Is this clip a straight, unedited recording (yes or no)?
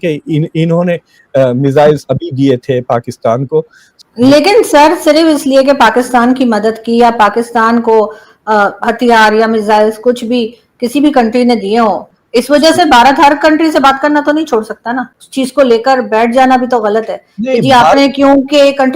no